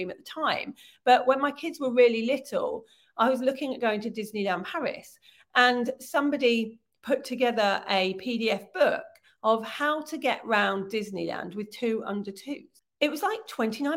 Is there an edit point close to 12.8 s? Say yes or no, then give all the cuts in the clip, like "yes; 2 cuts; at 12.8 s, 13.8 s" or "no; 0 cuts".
yes; 1 cut; at 12.8 s